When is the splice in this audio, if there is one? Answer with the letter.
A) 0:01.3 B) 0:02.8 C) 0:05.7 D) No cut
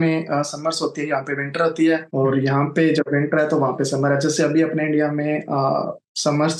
D